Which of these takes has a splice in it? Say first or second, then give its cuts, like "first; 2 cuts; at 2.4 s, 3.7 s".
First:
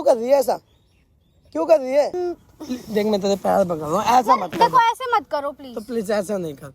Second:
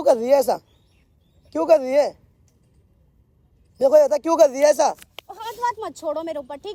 first; 1 cut; at 2.1 s